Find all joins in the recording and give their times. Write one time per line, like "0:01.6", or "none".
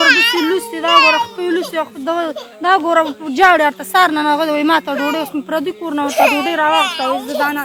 none